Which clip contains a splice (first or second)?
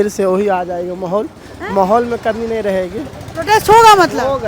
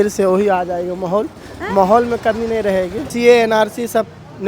second